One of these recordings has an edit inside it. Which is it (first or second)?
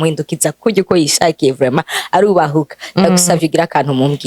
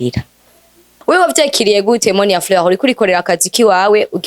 second